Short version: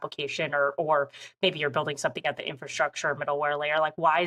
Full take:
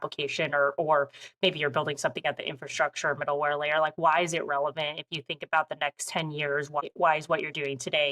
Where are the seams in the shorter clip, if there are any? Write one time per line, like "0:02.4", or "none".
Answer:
none